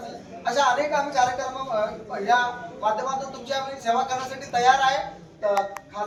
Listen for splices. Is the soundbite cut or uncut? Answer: uncut